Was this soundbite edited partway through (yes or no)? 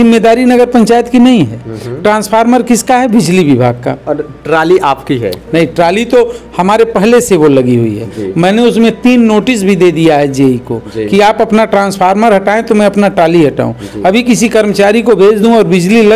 no